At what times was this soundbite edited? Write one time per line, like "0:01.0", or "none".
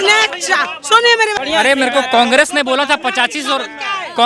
0:01.4